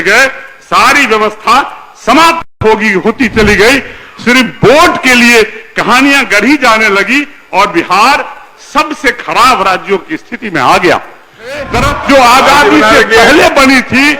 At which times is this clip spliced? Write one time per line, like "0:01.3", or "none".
0:11.8